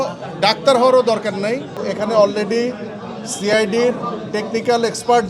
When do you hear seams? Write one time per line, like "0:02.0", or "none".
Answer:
0:01.8